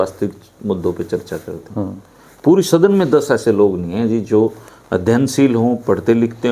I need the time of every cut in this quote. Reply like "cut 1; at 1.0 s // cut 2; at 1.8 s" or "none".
none